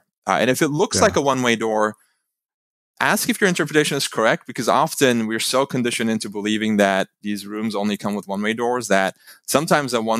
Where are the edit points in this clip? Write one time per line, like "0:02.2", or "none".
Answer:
none